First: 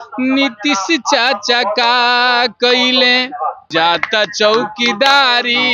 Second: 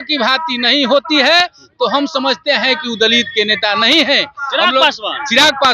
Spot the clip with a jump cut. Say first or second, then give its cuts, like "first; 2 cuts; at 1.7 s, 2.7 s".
first; 1 cut; at 3.6 s